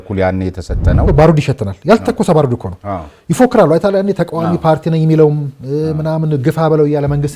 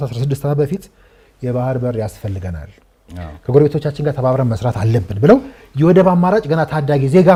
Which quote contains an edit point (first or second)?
first